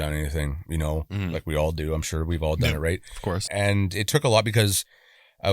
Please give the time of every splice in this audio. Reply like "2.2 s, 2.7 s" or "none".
3.4 s